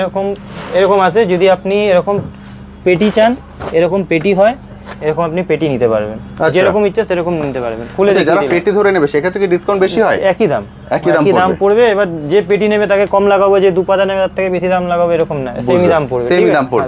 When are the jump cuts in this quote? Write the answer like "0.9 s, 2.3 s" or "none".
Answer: none